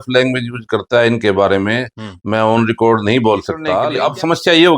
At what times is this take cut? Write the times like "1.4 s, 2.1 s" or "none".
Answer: 3.8 s